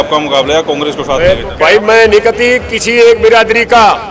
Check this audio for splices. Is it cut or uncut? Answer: cut